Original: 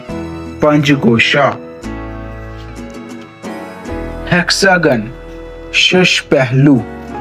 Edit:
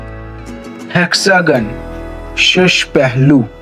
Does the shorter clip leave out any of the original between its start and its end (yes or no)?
yes